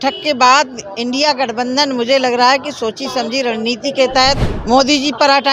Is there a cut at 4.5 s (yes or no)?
yes